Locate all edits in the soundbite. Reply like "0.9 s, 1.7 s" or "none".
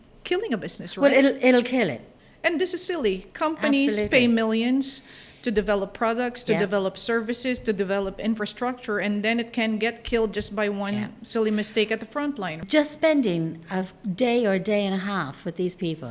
2.1 s, 12.6 s